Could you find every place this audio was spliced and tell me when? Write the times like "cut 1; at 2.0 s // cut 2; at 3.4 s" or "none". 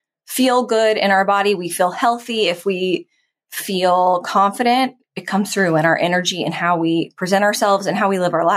none